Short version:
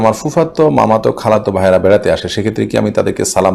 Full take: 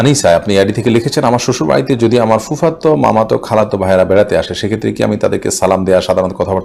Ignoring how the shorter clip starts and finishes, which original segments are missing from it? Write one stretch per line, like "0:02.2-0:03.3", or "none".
none